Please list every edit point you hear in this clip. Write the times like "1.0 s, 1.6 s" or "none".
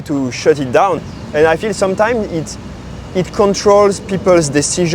1.0 s